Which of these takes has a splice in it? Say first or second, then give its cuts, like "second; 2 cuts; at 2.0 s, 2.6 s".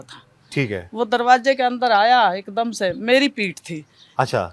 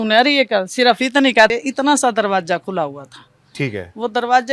second; 1 cut; at 1.5 s